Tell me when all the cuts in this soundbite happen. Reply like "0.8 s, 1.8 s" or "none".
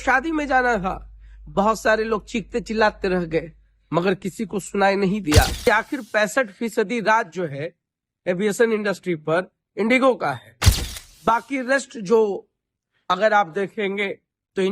5.7 s

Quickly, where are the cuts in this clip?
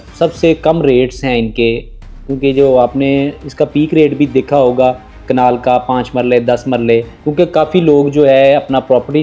3.6 s, 7.2 s

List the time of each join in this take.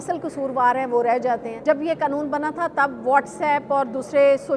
1.5 s

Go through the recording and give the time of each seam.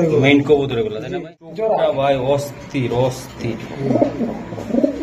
1.0 s

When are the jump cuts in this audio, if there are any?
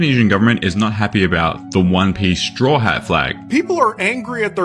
3.4 s

